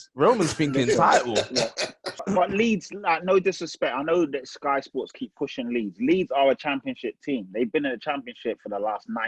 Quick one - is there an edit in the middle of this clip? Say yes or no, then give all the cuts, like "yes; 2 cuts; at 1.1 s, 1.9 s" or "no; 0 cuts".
yes; 1 cut; at 2.2 s